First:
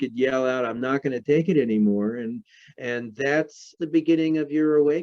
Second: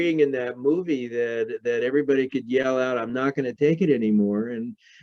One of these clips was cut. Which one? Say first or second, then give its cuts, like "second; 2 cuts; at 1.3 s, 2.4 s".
first; 1 cut; at 3.8 s